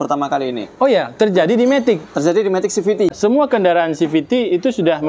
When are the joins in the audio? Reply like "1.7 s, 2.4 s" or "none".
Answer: 3.2 s